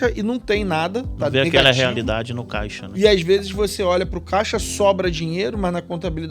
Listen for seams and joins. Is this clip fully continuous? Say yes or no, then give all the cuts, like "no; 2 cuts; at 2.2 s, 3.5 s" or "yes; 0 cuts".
yes; 0 cuts